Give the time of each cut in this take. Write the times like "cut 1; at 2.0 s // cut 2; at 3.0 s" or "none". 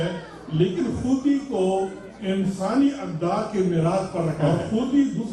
cut 1; at 4.4 s